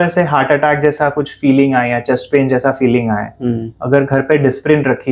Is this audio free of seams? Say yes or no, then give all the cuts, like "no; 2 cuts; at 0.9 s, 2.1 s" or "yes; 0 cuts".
yes; 0 cuts